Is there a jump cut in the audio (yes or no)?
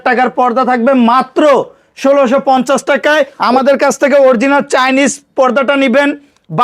yes